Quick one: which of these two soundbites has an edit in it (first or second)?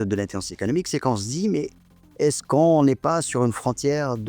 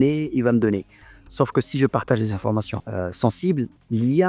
second